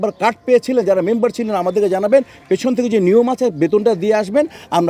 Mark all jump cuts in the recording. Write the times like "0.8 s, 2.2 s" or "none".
none